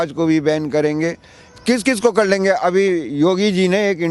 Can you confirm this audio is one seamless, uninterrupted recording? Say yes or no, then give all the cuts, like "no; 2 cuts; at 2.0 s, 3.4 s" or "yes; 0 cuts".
yes; 0 cuts